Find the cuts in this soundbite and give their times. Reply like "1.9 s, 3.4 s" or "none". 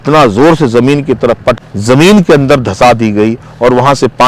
1.5 s